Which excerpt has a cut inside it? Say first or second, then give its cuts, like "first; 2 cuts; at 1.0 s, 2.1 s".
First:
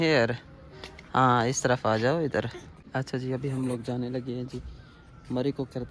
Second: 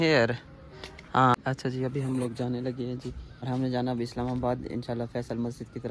second; 2 cuts; at 1.3 s, 3.4 s